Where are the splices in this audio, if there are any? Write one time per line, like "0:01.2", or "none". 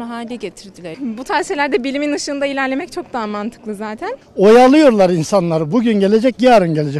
0:00.9
0:04.2